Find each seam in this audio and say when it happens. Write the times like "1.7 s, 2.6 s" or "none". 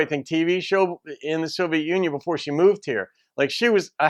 none